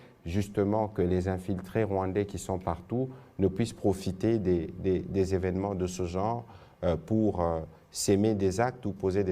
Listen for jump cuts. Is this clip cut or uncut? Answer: uncut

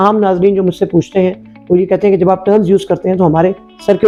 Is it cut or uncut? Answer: uncut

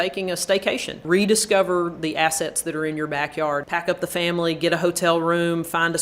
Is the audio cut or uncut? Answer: cut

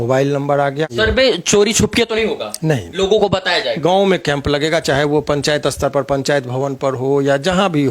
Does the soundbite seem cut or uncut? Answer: cut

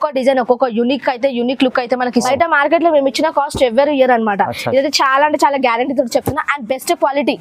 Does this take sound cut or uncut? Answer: cut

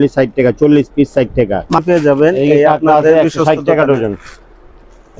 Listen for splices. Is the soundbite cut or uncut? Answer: cut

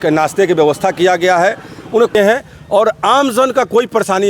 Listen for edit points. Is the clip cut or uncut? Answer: cut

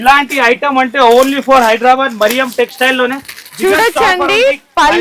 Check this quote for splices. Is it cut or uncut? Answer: uncut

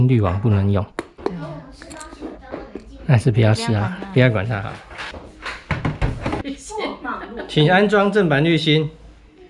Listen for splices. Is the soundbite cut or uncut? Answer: cut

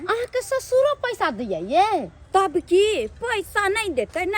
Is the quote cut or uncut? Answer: uncut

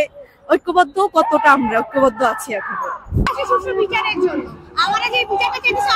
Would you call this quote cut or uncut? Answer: cut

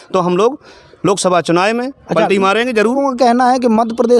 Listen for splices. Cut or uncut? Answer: cut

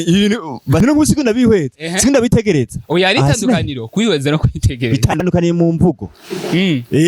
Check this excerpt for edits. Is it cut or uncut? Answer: cut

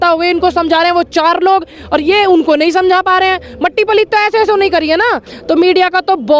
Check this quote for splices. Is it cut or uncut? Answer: cut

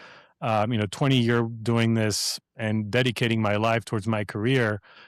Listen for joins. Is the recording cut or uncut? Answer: uncut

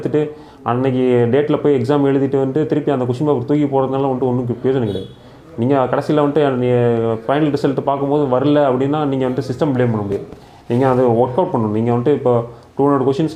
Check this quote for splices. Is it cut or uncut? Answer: uncut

